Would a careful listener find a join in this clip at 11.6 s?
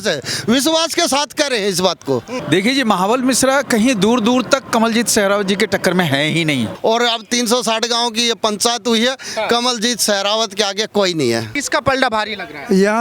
yes; 3 cuts; at 2.4 s, 6.7 s, 11.6 s

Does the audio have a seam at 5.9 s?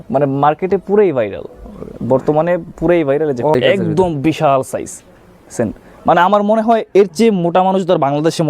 no; 1 cut; at 3.5 s

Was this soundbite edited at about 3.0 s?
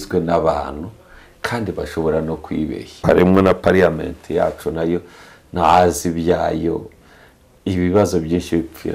yes; 1 cut; at 3.0 s

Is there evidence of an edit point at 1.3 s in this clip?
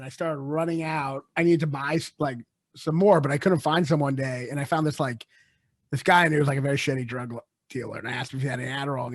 yes; 1 cut; at 1.3 s

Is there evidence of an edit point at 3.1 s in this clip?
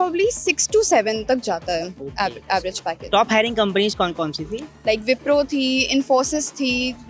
yes; 1 cut; at 3.1 s

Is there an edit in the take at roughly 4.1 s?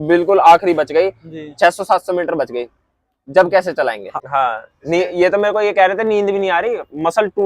yes; 1 cut; at 4.1 s

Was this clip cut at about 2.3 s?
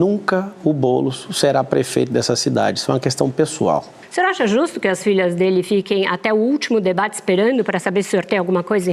no; 1 cut; at 4.0 s

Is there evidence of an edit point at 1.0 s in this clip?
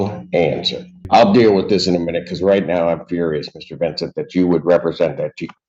yes; 1 cut; at 1.0 s

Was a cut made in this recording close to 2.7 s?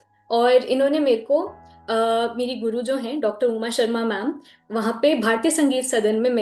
no; 0 cuts

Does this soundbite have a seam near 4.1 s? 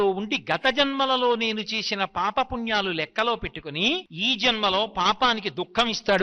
yes; 1 cut; at 4.1 s

